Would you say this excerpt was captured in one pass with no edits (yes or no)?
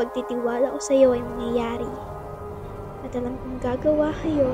yes